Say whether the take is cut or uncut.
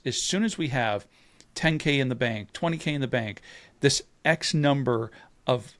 uncut